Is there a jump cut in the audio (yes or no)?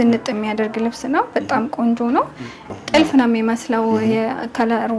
yes